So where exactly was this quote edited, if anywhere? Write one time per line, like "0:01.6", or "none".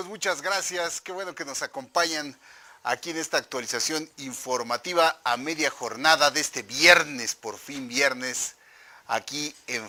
none